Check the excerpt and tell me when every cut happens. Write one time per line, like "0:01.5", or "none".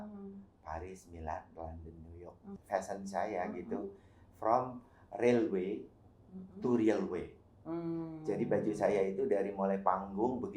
0:02.5